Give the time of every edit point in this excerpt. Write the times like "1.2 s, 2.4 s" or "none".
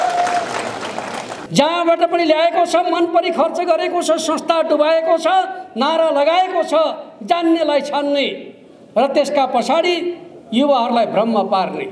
1.4 s